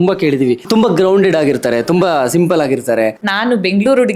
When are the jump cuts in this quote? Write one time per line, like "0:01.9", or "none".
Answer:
0:03.2

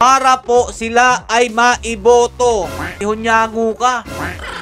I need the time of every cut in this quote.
0:03.0

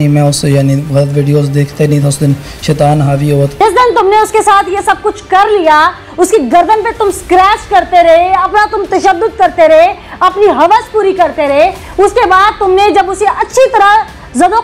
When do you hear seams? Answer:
0:03.6

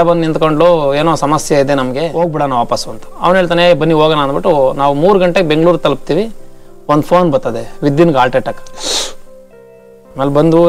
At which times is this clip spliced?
none

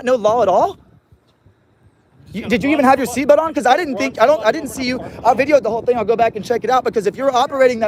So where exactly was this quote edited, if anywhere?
none

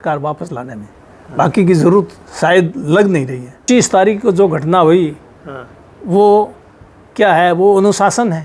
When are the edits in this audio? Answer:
0:03.6

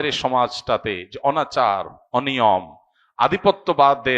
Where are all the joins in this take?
none

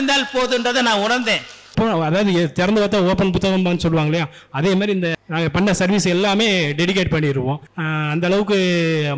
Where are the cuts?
0:01.7
0:07.7

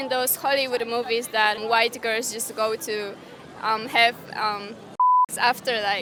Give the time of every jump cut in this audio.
none

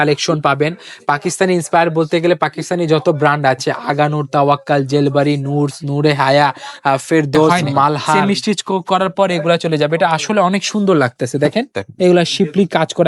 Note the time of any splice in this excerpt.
0:08.2

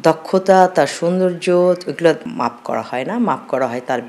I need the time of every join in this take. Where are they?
none

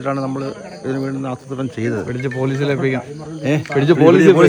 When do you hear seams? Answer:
none

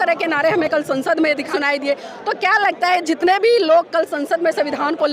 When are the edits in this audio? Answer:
0:01.5

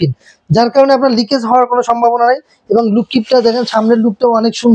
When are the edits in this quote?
none

